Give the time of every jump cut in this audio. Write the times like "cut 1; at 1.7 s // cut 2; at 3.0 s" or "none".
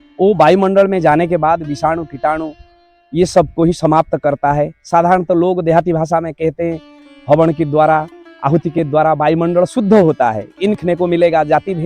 cut 1; at 10.8 s